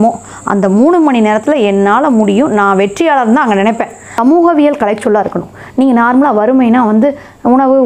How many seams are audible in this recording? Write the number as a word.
one